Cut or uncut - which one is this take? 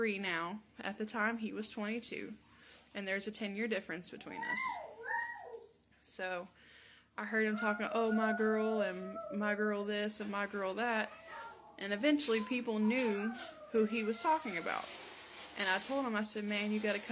uncut